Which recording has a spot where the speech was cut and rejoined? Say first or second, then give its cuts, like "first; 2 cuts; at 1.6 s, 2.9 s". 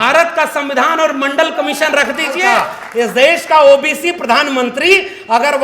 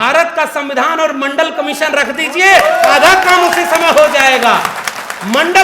first; 1 cut; at 2.4 s